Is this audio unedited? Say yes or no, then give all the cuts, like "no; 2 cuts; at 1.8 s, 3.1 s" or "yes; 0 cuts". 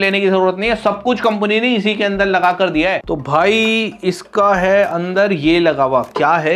no; 1 cut; at 3.0 s